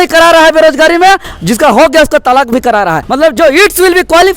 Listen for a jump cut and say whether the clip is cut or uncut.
cut